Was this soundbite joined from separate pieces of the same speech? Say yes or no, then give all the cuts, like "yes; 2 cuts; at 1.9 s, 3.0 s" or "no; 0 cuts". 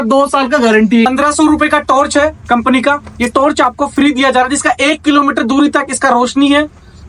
yes; 1 cut; at 1.1 s